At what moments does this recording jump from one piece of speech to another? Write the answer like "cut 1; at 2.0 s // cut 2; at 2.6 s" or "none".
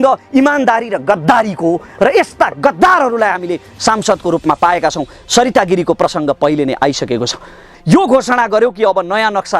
cut 1; at 7.7 s

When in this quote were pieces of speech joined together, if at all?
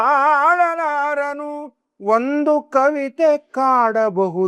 none

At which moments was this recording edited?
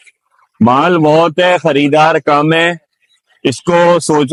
none

